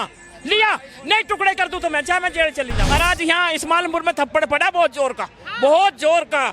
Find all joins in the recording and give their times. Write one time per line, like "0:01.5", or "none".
0:02.8